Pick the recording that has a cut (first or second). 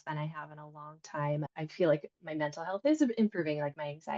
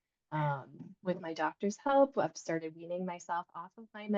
first